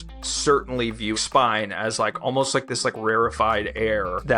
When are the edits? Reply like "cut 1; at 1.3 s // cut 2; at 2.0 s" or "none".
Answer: cut 1; at 1.1 s

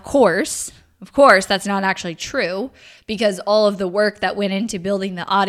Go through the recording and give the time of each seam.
none

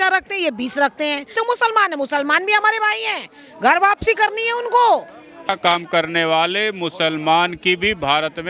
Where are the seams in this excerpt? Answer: cut 1; at 1.3 s // cut 2; at 5.5 s

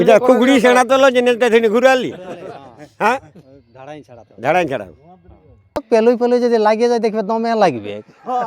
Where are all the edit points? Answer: cut 1; at 5.8 s

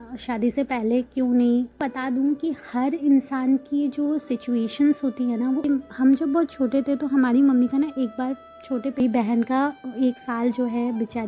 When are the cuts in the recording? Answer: cut 1; at 1.8 s // cut 2; at 5.6 s // cut 3; at 9.0 s

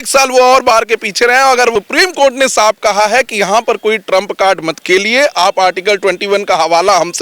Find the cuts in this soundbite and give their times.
cut 1; at 1.7 s

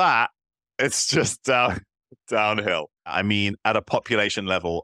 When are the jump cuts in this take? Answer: cut 1; at 3.1 s

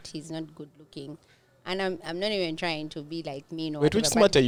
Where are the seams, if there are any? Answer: none

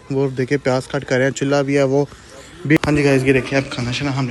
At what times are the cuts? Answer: cut 1; at 2.8 s

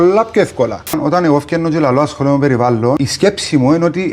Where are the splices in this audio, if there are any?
cut 1; at 1.0 s // cut 2; at 3.0 s

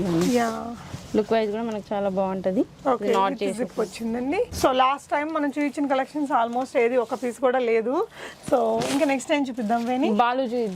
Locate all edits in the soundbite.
none

